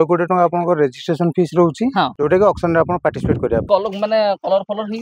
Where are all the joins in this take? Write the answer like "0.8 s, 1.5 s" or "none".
2.1 s, 3.6 s